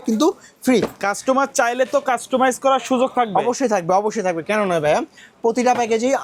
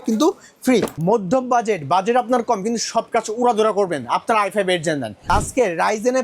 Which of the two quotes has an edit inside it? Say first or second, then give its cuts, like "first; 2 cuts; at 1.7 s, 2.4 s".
second; 2 cuts; at 0.9 s, 5.3 s